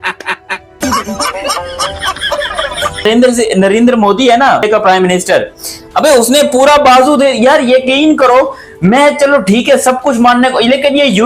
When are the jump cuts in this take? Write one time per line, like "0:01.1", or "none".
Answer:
0:03.0
0:04.6

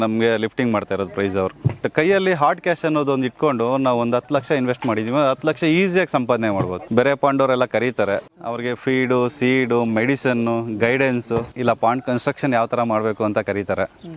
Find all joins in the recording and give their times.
0:01.9
0:06.8
0:08.3
0:11.5

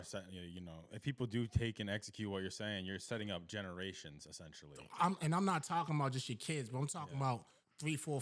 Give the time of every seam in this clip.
none

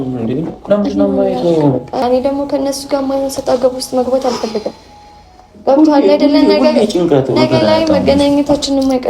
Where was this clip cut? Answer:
0:02.0

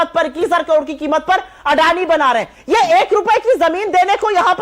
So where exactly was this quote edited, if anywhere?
none

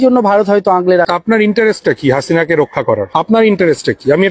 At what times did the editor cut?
0:01.1
0:03.1

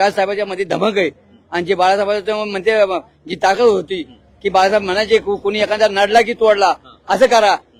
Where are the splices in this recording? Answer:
none

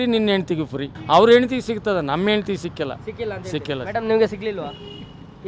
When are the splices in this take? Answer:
0:00.9

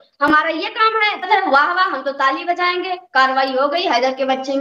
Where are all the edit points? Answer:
0:01.3

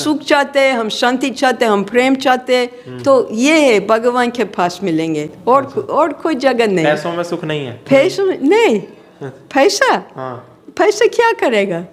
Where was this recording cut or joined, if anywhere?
none

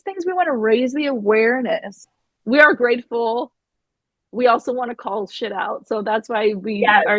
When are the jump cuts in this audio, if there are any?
0:01.9

